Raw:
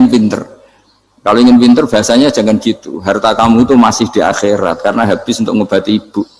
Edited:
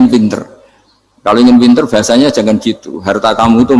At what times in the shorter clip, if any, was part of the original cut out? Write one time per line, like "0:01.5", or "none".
none